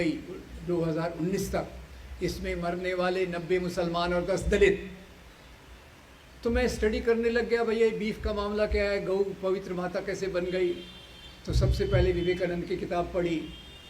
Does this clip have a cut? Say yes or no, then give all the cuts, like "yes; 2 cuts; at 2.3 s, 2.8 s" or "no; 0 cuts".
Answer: no; 0 cuts